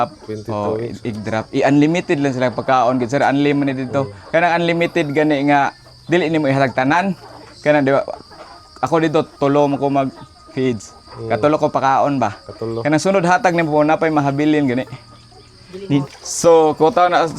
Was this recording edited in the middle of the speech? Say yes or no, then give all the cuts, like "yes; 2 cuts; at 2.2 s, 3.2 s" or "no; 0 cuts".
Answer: yes; 1 cut; at 16.2 s